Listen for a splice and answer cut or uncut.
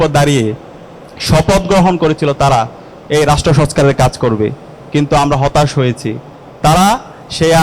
uncut